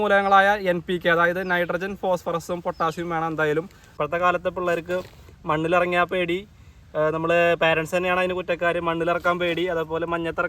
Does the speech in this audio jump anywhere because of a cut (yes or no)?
yes